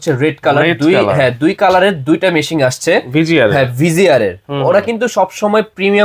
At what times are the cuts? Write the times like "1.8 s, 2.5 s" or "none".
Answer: none